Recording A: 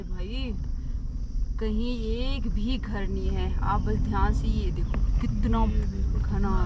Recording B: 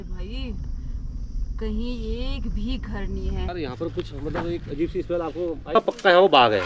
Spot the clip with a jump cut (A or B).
B